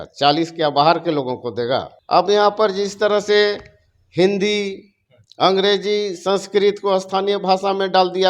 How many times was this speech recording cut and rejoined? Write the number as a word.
one